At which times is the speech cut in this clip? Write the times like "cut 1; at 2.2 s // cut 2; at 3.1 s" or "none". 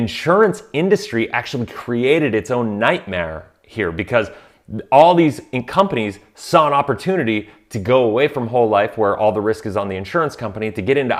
none

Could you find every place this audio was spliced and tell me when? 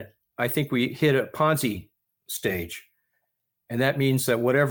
none

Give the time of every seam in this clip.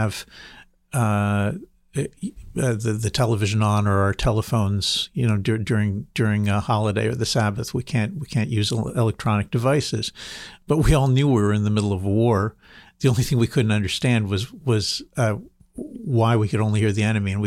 none

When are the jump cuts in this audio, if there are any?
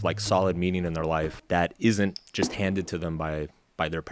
cut 1; at 1.4 s // cut 2; at 2.2 s

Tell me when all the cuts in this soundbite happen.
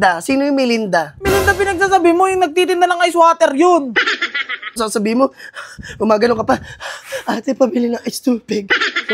cut 1; at 4.8 s

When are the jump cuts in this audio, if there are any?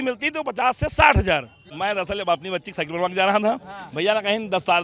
cut 1; at 1.6 s

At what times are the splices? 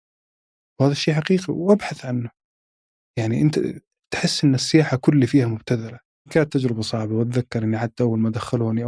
cut 1; at 6.2 s

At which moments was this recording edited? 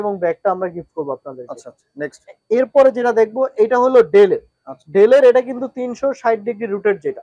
none

